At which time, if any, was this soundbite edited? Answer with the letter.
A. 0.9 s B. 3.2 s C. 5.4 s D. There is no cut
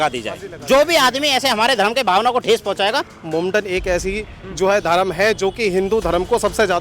B